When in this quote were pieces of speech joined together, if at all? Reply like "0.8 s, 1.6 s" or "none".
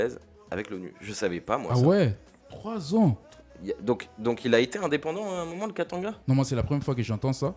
6.2 s